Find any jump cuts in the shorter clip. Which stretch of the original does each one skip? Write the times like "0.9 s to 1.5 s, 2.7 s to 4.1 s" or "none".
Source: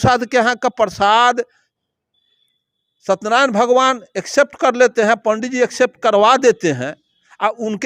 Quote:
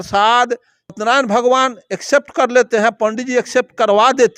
1.8 s to 3.2 s